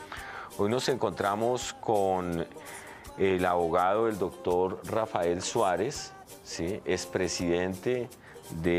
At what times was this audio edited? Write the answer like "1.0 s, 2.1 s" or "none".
none

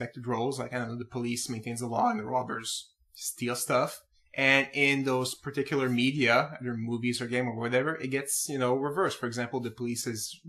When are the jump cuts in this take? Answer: 7.5 s

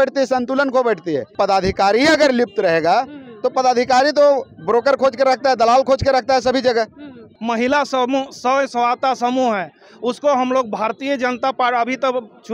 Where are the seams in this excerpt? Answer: 1.3 s, 7.3 s

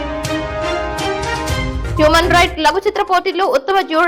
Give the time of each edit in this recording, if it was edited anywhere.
1.8 s

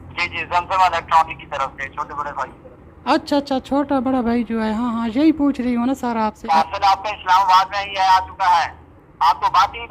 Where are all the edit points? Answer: 6.4 s

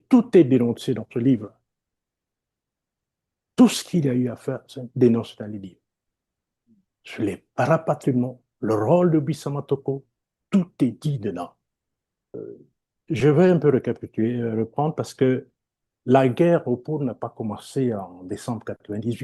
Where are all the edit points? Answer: 12.3 s

